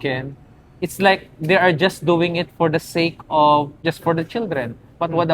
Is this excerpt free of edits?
no; 1 cut; at 3.7 s

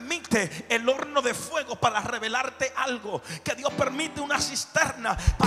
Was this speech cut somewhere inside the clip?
no; 0 cuts

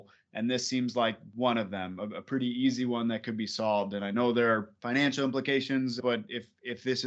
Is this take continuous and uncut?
no; 2 cuts; at 4.7 s, 6.0 s

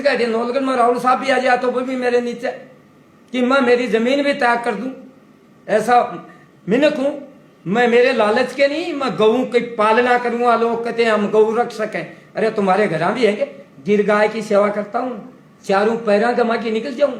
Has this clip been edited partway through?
no; 0 cuts

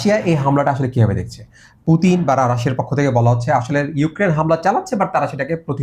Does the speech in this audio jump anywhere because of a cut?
no; 0 cuts

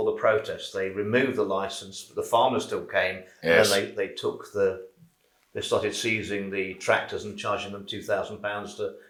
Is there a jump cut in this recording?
no; 0 cuts

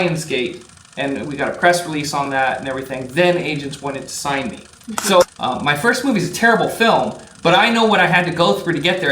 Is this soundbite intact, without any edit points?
no; 1 cut; at 5.2 s

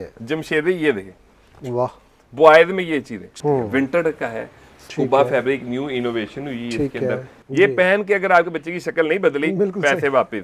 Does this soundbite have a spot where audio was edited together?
yes; 2 cuts; at 3.2 s, 7.4 s

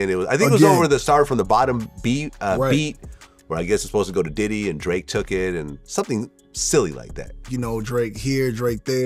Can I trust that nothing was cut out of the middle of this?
no; 1 cut; at 7.4 s

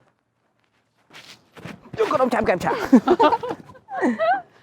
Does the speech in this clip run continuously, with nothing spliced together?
no; 1 cut; at 1.1 s

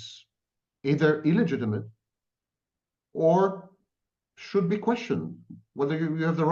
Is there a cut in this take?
no; 0 cuts

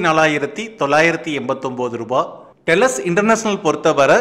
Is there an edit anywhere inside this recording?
no; 0 cuts

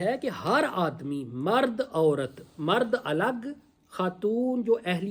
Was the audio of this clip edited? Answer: no; 0 cuts

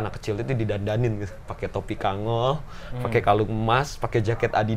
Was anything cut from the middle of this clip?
no; 0 cuts

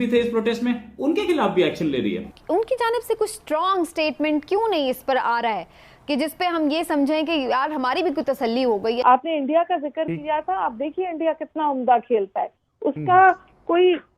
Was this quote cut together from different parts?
yes; 2 cuts; at 2.4 s, 9.0 s

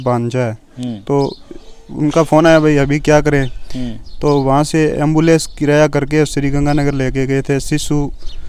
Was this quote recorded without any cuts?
yes; 0 cuts

